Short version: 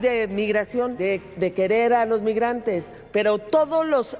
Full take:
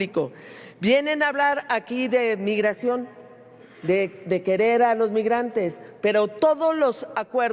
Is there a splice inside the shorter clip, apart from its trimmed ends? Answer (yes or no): yes